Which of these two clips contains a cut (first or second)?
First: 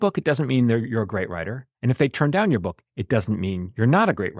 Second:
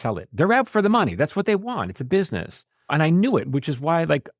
second